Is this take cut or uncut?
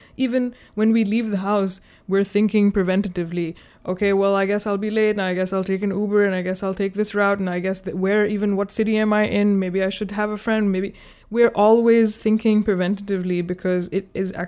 uncut